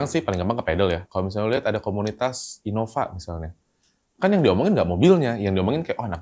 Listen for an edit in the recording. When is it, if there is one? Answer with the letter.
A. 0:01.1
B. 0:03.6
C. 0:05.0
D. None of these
A